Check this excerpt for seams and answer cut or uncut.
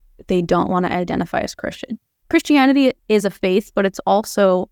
cut